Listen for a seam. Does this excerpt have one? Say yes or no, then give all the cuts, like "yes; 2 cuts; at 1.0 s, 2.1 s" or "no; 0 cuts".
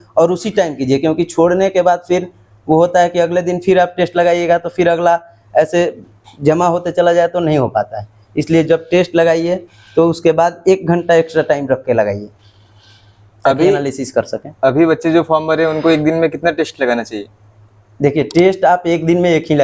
no; 0 cuts